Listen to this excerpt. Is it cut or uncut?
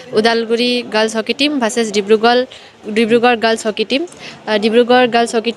uncut